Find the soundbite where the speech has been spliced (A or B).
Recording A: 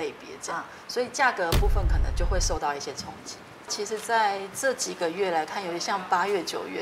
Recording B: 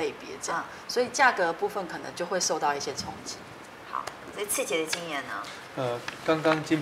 A